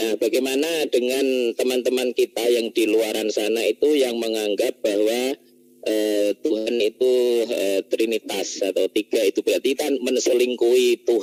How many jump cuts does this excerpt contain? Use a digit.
0